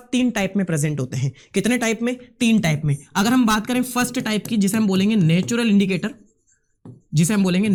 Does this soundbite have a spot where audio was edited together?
no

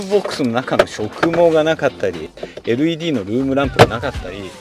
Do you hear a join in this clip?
yes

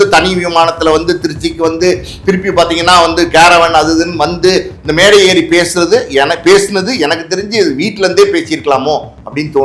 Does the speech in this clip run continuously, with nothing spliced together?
yes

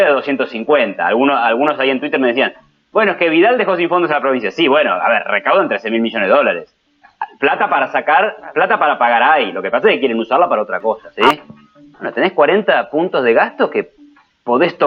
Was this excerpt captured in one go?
no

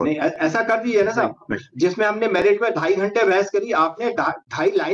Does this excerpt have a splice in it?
no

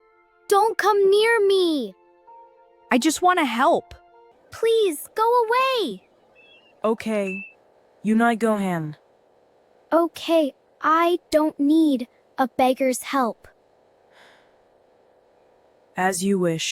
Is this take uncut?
yes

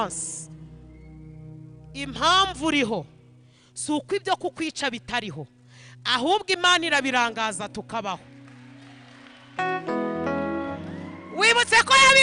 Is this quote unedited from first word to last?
yes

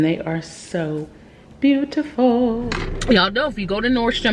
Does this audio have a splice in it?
yes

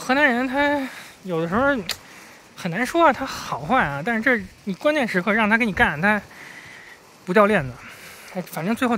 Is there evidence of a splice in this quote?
no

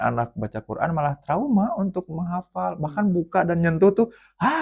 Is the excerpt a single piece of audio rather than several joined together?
yes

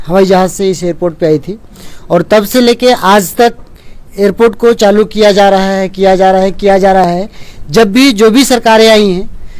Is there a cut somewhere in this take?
no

